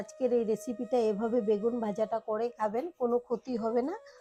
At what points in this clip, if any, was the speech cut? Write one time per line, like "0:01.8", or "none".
none